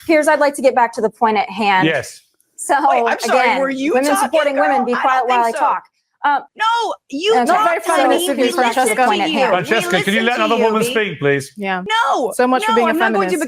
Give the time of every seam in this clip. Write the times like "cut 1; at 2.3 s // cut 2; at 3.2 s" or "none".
cut 1; at 6.5 s // cut 2; at 11.8 s